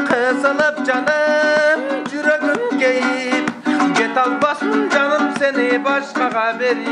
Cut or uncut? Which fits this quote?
uncut